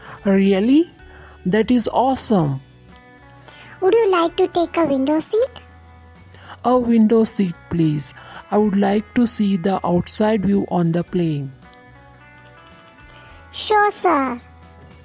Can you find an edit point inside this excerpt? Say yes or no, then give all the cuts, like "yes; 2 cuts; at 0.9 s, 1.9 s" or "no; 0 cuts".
no; 0 cuts